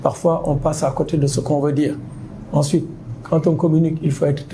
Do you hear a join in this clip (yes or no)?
no